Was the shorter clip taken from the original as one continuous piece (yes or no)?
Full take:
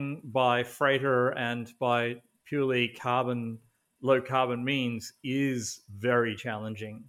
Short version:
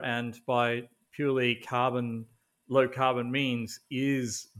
yes